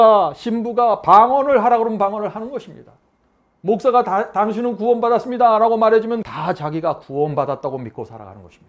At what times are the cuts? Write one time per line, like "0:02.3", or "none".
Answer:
0:06.3